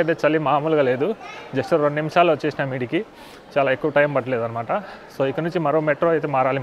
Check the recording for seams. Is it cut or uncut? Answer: uncut